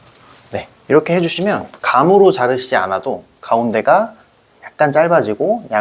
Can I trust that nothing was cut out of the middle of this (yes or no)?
no